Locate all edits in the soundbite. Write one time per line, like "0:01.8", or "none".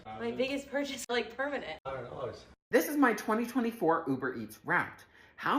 0:02.5